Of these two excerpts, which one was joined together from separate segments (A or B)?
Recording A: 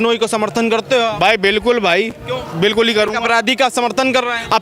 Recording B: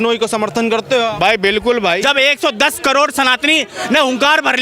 B